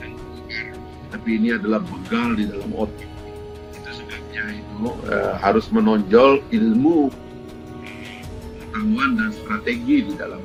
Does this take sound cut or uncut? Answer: uncut